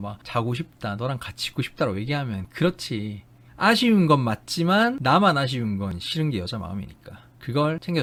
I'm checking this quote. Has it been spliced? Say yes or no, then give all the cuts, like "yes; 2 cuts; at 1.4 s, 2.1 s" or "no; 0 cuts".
no; 0 cuts